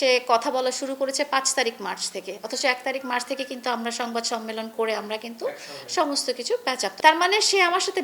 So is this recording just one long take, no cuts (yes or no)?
no